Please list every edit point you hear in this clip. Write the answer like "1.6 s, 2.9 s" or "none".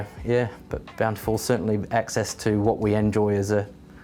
none